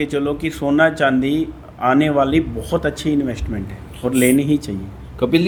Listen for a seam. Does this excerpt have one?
no; 0 cuts

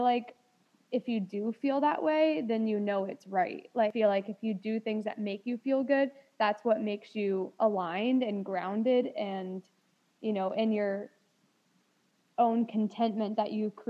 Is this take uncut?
no; 1 cut; at 3.7 s

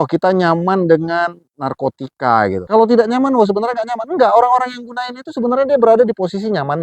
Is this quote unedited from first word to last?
no; 1 cut; at 2.6 s

